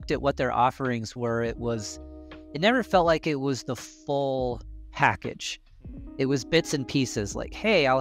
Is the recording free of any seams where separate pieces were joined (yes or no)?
yes